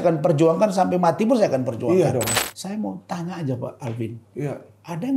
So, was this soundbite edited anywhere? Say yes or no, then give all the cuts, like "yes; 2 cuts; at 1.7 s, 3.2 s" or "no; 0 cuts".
yes; 1 cut; at 2.4 s